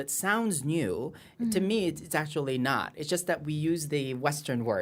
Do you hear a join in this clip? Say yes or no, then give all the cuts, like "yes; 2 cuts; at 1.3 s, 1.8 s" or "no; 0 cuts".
no; 0 cuts